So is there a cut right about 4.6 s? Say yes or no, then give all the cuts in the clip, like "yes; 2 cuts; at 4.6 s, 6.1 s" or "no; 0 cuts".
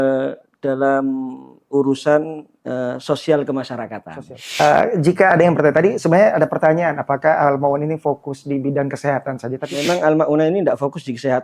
yes; 2 cuts; at 4.6 s, 9.7 s